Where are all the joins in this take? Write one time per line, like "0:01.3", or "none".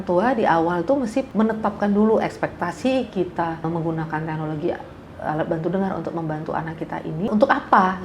0:01.3
0:03.7
0:07.3